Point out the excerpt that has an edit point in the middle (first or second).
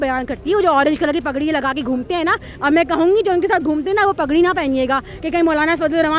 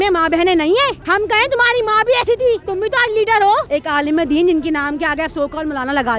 second